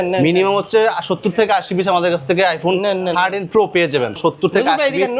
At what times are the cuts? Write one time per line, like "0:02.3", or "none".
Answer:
0:04.2